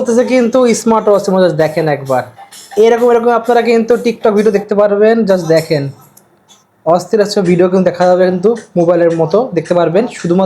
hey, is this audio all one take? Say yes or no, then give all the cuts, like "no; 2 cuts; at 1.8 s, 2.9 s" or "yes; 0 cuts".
yes; 0 cuts